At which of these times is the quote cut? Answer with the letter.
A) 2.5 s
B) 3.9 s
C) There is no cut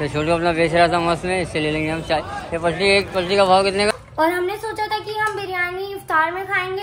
B